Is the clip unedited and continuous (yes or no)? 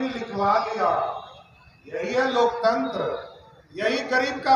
yes